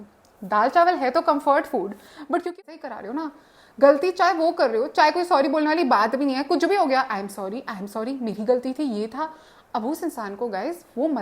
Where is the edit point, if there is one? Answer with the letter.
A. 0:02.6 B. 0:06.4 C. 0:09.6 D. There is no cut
A